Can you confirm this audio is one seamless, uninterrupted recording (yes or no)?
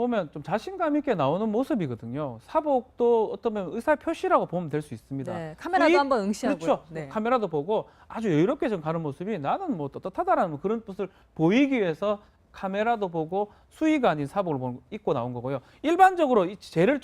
no